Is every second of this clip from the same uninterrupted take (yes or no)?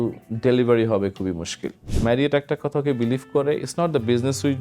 no